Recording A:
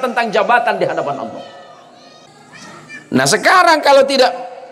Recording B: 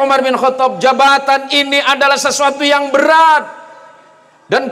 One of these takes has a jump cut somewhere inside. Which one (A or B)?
A